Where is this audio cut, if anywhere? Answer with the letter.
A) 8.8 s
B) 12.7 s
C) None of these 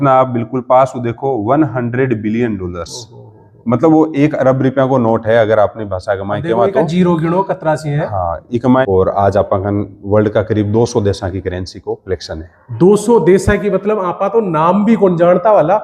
A